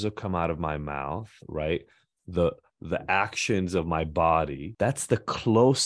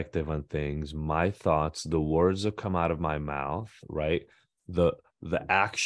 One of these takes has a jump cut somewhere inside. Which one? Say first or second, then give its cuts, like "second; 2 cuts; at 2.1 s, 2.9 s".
first; 1 cut; at 4.6 s